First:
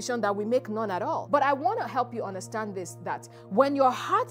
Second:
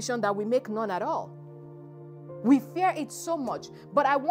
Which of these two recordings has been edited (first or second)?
first